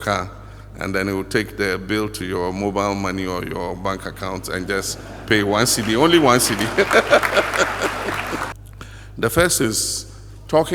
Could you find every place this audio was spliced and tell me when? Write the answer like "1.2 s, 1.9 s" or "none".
8.5 s